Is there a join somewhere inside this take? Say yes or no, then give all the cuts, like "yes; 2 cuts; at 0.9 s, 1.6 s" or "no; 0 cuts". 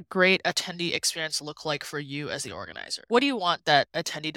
no; 0 cuts